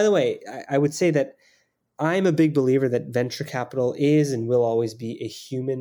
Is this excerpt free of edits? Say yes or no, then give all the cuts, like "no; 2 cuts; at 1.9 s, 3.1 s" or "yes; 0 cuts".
yes; 0 cuts